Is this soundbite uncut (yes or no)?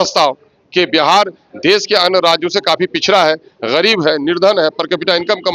yes